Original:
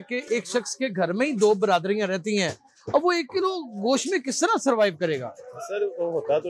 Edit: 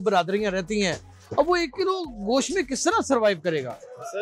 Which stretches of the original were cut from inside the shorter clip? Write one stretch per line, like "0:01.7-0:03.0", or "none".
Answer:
none